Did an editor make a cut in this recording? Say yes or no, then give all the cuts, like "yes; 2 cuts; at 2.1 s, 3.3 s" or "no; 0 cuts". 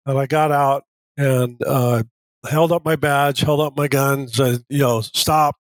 no; 0 cuts